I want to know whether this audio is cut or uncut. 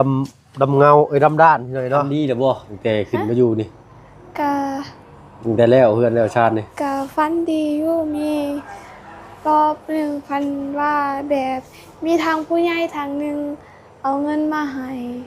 cut